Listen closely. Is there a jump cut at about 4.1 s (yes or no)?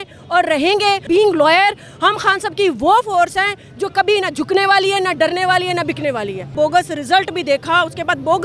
no